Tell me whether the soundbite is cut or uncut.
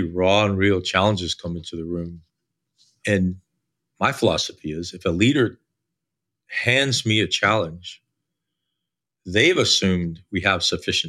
uncut